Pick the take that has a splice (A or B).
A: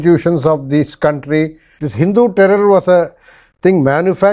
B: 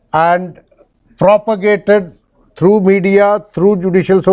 A